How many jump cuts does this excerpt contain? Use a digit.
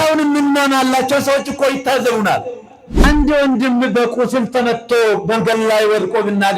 1